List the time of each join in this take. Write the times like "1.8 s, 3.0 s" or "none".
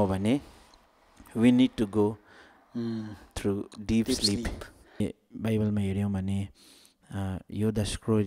5.0 s